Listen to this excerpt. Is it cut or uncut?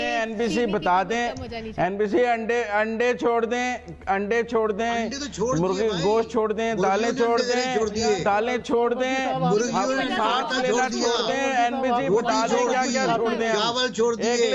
uncut